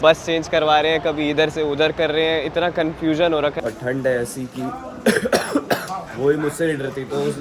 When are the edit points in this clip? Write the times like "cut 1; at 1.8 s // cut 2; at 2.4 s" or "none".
cut 1; at 3.5 s